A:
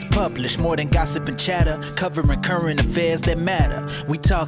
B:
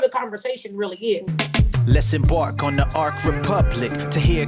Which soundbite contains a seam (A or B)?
B